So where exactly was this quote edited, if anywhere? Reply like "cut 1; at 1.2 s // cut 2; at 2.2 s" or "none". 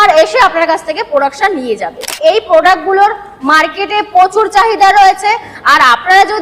cut 1; at 2.1 s